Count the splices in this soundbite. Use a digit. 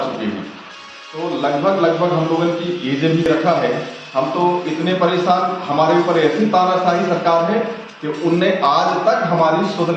1